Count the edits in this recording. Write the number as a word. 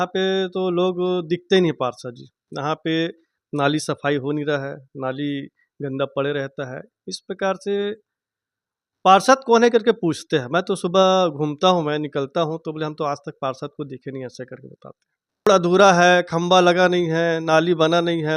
one